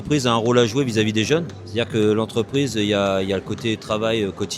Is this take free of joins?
no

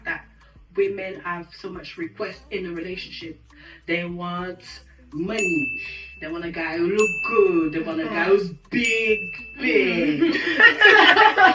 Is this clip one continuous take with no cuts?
yes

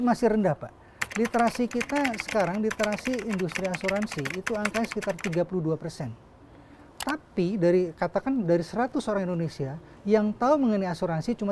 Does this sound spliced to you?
no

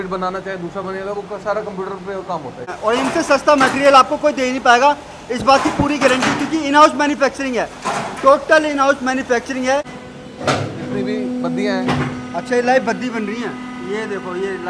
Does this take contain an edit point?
yes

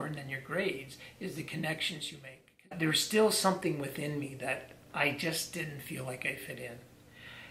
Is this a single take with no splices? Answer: no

